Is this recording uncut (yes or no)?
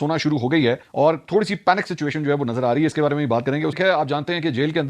no